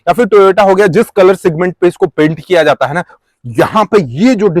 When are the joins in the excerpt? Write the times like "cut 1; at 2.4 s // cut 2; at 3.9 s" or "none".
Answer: cut 1; at 3.1 s